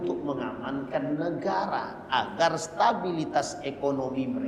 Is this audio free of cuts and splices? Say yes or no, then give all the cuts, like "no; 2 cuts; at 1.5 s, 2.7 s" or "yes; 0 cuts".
yes; 0 cuts